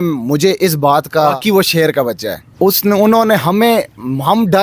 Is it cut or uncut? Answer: cut